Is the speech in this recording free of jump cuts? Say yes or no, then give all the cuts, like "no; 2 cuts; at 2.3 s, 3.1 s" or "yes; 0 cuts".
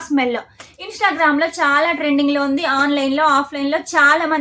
yes; 0 cuts